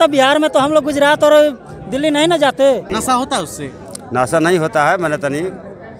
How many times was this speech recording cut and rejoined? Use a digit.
1